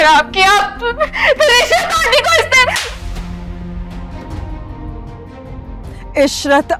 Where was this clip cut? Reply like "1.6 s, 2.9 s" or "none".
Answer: 4.2 s

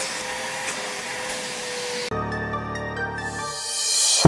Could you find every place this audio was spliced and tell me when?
2.4 s

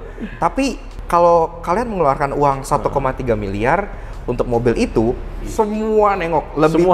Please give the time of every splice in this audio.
0.9 s, 5.5 s

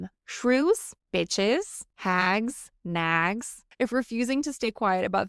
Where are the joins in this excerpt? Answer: 1.0 s, 1.8 s, 2.7 s, 3.6 s

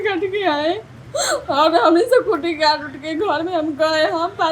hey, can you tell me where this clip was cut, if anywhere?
none

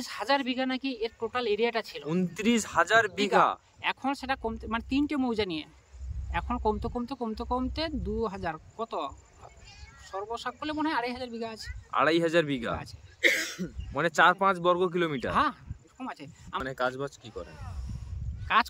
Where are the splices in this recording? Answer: none

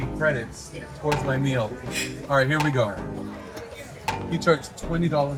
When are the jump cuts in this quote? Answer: none

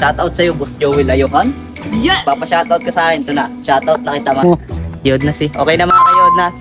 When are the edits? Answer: 4.4 s

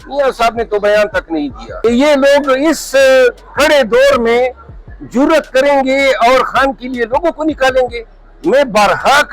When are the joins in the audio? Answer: 1.6 s

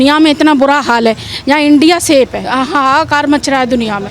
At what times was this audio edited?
2.4 s

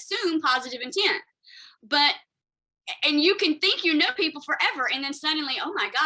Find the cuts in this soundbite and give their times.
4.1 s

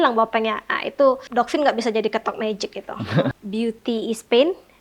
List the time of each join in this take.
1.2 s, 3.4 s

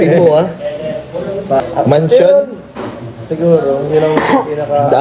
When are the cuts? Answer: 1.6 s

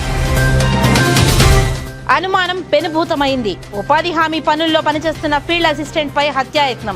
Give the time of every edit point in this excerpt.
1.8 s

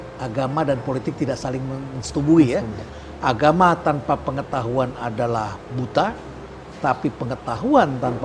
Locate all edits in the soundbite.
2.8 s

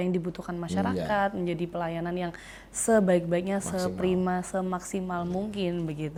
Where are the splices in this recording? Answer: none

